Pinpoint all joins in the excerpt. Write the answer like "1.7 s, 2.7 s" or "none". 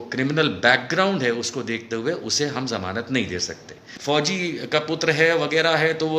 3.9 s